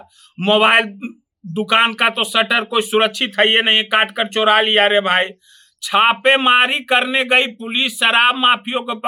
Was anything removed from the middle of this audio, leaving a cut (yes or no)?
no